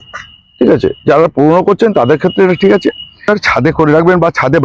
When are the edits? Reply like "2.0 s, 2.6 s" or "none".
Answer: 3.3 s